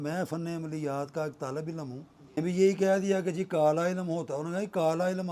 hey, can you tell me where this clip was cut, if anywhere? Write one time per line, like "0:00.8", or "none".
0:02.4